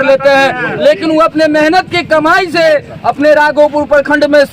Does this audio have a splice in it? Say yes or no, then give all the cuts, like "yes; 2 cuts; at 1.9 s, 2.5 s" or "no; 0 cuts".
no; 0 cuts